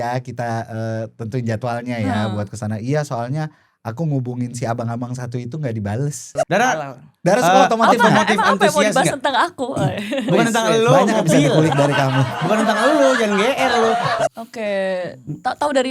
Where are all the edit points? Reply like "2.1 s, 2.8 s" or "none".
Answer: 6.3 s, 14.2 s

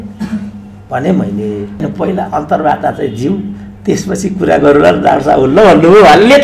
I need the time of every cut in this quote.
1.8 s

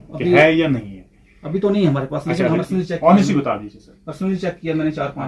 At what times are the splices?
2.6 s

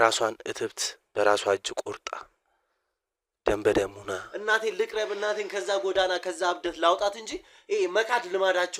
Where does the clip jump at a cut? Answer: 4.3 s

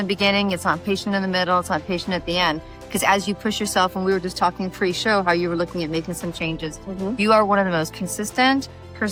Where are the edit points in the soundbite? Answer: none

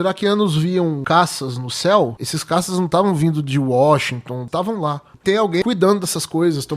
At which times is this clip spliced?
1.0 s, 2.3 s, 4.4 s, 5.6 s

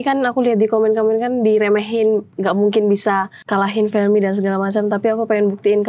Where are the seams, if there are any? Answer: 3.4 s

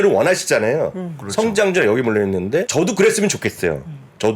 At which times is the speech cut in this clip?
2.7 s

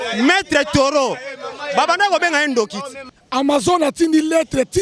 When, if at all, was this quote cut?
3.0 s

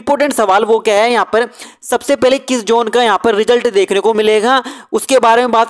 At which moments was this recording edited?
none

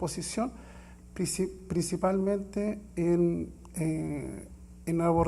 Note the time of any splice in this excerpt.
1.9 s

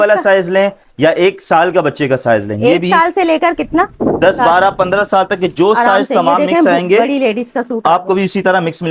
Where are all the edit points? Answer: none

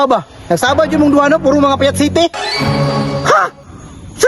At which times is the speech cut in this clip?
none

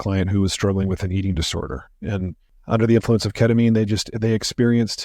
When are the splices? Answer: 2.5 s

